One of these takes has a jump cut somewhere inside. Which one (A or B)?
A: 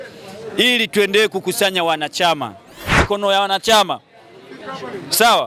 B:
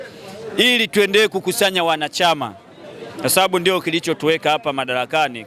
A